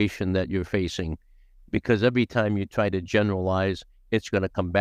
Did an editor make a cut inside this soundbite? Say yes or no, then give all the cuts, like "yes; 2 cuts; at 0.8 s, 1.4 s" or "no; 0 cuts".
no; 0 cuts